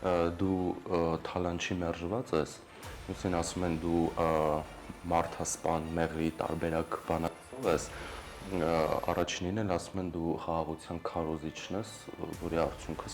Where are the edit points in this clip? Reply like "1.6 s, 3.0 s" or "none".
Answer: none